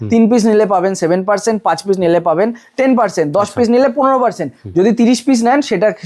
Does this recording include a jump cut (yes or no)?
no